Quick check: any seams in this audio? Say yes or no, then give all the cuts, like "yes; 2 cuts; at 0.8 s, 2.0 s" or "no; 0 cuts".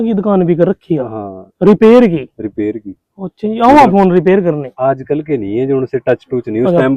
no; 0 cuts